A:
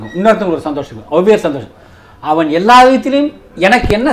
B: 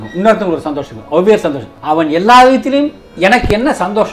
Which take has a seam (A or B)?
B